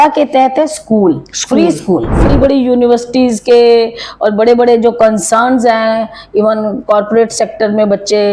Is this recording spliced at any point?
yes; 1 cut; at 2.3 s

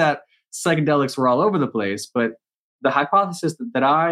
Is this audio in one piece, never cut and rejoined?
no; 1 cut; at 2.7 s

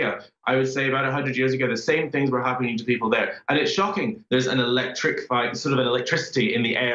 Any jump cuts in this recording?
yes; 1 cut; at 4.2 s

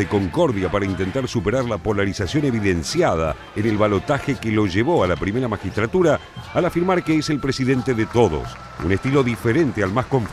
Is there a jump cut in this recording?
no; 0 cuts

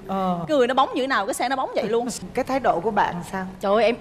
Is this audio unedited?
no; 1 cut; at 2.1 s

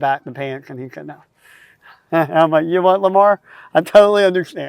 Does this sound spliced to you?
no; 0 cuts

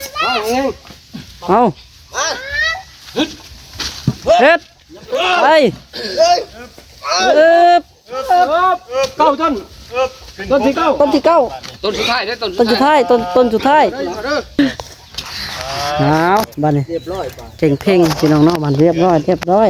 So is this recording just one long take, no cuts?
no; 1 cut; at 14.6 s

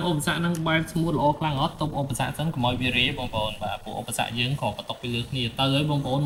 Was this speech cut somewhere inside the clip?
no; 0 cuts

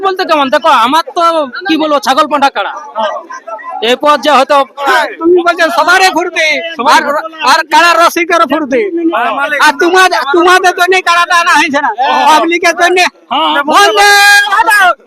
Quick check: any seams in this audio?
yes; 2 cuts; at 4.8 s, 13.5 s

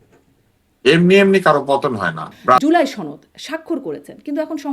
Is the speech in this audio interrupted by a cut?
yes; 1 cut; at 2.6 s

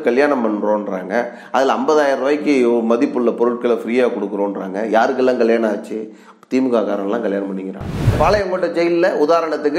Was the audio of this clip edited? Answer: yes; 1 cut; at 8.1 s

